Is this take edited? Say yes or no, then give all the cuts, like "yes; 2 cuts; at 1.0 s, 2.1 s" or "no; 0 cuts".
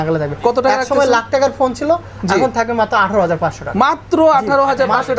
no; 0 cuts